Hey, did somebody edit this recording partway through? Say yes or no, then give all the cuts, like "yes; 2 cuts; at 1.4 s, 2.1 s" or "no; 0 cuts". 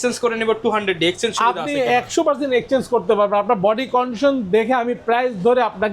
no; 0 cuts